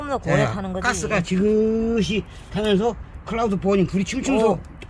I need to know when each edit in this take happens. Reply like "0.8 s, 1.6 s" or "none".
none